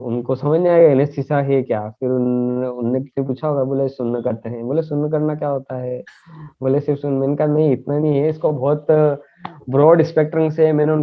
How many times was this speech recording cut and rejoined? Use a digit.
0